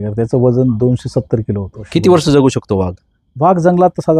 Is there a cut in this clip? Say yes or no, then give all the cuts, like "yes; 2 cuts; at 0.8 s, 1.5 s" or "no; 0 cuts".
yes; 1 cut; at 1.8 s